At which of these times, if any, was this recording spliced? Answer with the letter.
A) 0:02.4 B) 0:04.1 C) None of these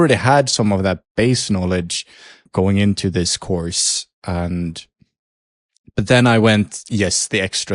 A